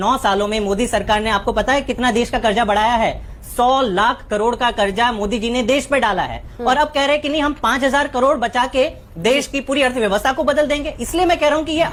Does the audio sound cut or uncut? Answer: uncut